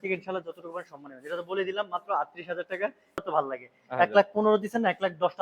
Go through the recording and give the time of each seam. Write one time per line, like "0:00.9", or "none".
0:03.2